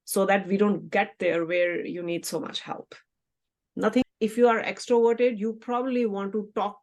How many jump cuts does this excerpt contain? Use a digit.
1